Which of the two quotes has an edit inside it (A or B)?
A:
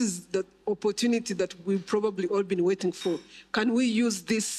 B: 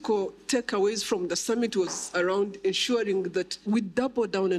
B